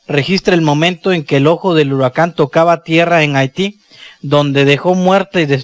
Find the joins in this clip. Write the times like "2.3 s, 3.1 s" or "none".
4.6 s

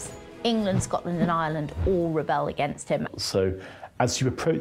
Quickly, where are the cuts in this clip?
3.1 s

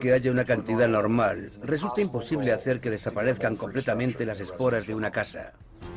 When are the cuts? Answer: 1.9 s

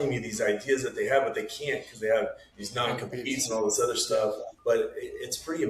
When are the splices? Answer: 2.5 s, 4.5 s

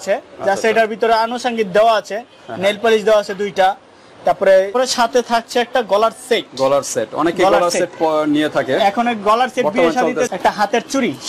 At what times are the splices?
4.8 s, 10.3 s

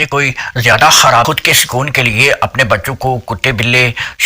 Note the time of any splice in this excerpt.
1.3 s

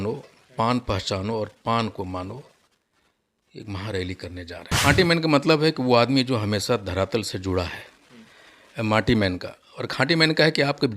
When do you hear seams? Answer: 4.8 s

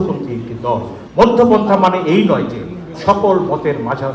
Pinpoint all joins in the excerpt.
1.0 s

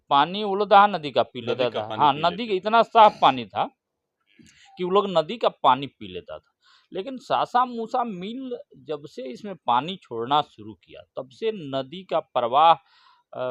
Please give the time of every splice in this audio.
none

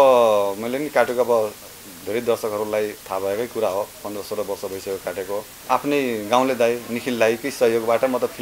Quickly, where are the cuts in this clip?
5.5 s

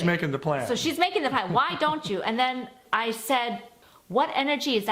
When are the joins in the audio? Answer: 2.8 s, 3.8 s

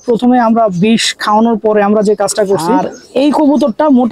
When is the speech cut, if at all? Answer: 2.9 s

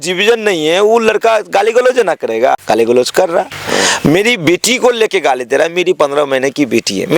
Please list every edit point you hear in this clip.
2.6 s, 3.6 s

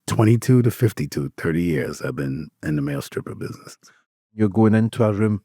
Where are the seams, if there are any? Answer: 4.3 s

